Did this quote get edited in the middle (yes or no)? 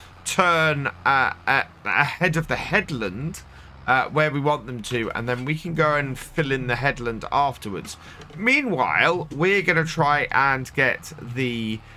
no